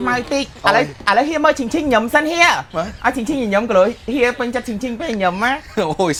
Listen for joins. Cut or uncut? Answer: uncut